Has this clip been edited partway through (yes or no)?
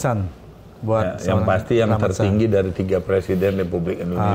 no